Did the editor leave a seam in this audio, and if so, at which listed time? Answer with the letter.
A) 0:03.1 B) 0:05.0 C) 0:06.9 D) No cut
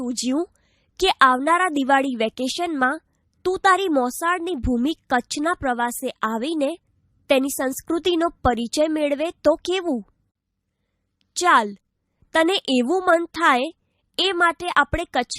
C